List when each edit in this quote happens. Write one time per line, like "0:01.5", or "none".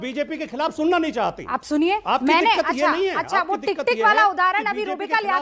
none